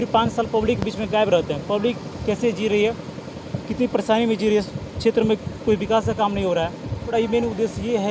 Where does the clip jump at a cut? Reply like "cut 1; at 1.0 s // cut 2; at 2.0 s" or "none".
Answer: cut 1; at 7.1 s